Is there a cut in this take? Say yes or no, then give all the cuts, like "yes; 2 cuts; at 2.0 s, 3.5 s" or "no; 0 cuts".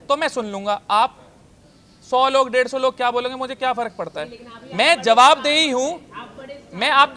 no; 0 cuts